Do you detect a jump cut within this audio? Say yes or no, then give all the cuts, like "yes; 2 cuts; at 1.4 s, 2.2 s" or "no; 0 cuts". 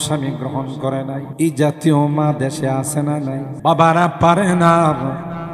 yes; 2 cuts; at 1.3 s, 3.5 s